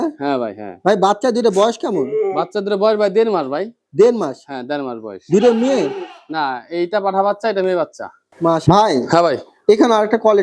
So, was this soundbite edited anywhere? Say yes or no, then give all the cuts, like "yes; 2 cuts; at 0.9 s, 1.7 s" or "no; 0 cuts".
yes; 1 cut; at 8.6 s